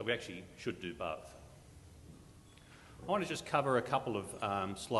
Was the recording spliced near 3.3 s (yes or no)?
no